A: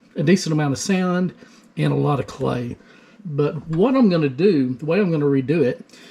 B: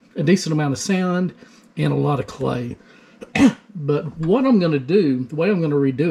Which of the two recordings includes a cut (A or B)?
A